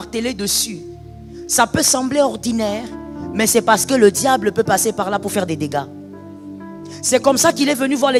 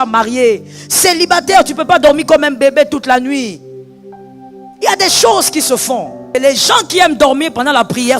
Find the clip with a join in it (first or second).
second